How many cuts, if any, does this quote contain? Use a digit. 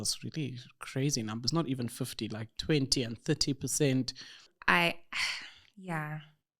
1